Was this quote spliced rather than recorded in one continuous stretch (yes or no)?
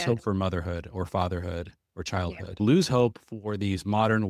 yes